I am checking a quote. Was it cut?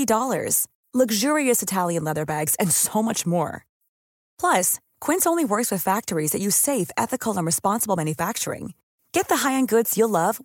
no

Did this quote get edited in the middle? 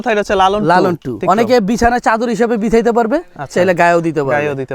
yes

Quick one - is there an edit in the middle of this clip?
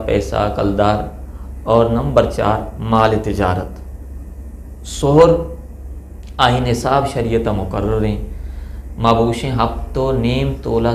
no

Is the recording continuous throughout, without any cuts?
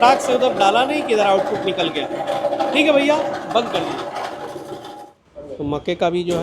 no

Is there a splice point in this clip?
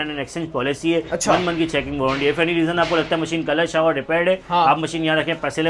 no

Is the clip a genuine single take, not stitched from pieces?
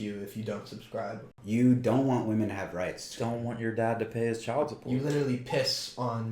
no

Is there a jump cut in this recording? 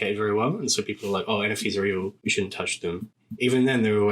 yes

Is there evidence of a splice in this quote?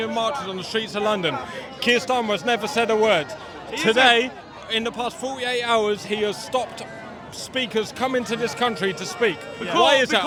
no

